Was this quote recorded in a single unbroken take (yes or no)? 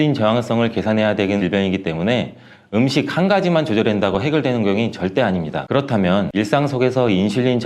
no